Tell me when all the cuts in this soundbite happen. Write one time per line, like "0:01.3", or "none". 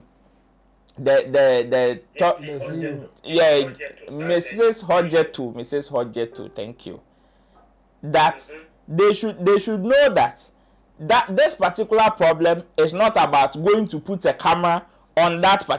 none